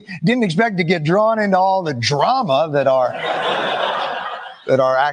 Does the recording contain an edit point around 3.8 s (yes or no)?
no